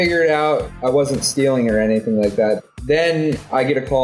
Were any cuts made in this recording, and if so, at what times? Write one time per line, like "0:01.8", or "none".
0:02.6